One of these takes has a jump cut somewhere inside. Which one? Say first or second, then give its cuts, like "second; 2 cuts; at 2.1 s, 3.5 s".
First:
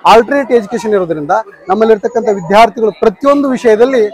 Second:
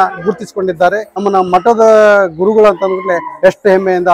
second; 1 cut; at 1.1 s